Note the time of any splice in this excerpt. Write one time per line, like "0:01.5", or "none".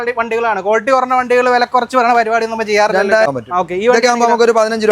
0:03.3